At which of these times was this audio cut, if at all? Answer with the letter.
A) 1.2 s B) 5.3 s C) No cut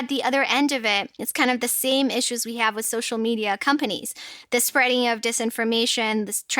A